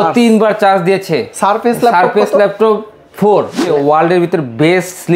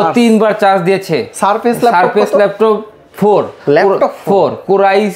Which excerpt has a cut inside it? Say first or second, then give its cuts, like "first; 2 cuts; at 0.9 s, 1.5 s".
first; 1 cut; at 3.6 s